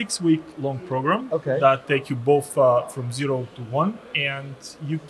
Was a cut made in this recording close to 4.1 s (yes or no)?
yes